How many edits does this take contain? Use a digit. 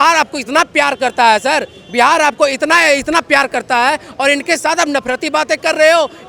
0